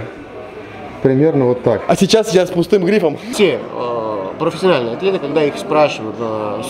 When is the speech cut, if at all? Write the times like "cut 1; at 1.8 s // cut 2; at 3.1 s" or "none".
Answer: cut 1; at 1.8 s // cut 2; at 3.2 s